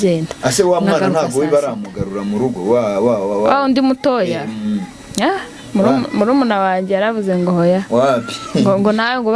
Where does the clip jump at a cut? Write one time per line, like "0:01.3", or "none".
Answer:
none